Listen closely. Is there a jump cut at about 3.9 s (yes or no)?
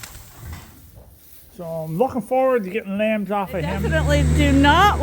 yes